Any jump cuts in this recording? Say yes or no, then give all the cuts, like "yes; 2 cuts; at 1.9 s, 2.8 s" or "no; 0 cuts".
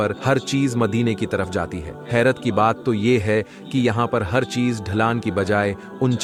no; 0 cuts